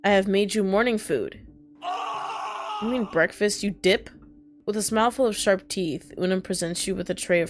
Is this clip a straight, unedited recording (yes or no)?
yes